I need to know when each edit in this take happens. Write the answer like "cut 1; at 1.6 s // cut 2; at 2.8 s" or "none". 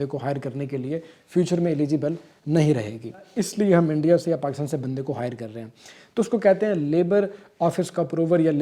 cut 1; at 3.3 s